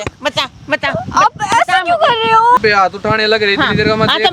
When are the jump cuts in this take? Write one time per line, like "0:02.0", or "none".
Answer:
0:02.6

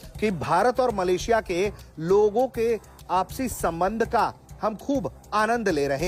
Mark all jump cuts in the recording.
none

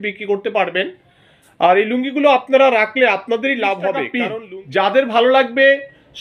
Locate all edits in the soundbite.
0:04.2

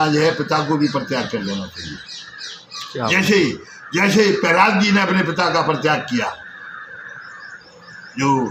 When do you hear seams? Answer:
none

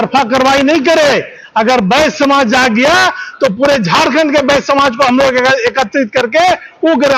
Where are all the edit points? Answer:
none

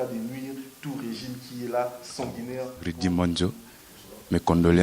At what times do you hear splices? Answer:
0:02.9

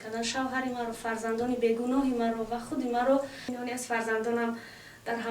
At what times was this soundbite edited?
0:03.4

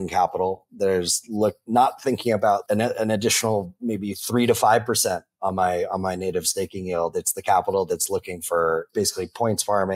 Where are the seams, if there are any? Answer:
0:02.6
0:08.9

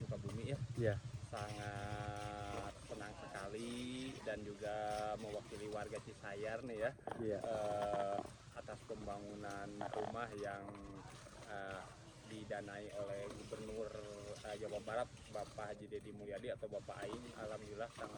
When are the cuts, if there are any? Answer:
none

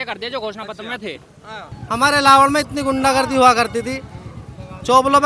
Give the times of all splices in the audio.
0:01.7

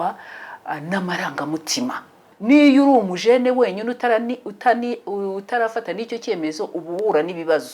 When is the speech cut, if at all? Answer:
0:02.3

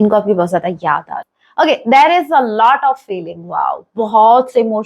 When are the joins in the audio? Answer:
0:01.7

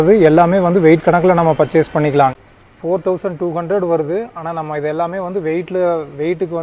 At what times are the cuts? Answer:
0:02.3

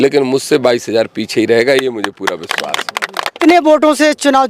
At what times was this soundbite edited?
0:03.4

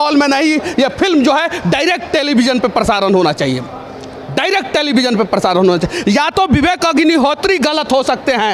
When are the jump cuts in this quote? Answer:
none

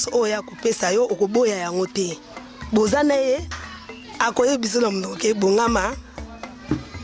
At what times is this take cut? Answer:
0:03.5

